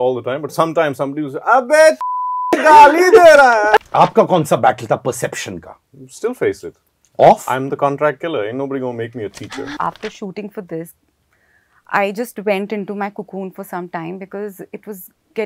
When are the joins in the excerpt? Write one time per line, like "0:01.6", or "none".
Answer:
0:03.8
0:09.8